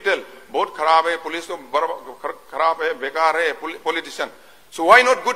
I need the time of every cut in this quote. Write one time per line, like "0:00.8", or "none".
none